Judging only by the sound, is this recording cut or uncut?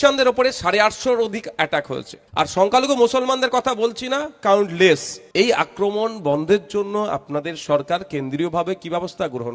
cut